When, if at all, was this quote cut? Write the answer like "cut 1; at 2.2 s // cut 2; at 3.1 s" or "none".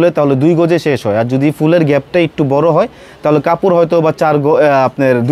none